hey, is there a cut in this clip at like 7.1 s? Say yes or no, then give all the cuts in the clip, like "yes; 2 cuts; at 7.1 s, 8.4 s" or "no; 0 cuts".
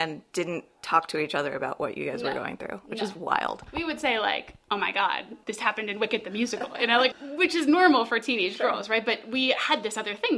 yes; 2 cuts; at 5.3 s, 7.1 s